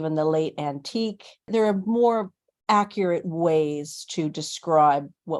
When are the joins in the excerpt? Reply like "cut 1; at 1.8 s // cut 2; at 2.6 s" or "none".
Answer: cut 1; at 1.5 s